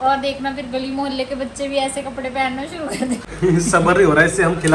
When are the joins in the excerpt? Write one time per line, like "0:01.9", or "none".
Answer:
0:03.2